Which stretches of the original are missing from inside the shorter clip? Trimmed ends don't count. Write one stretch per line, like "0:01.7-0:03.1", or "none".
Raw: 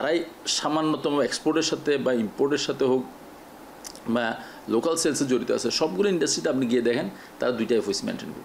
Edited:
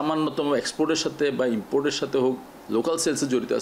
0:03.2-0:04.5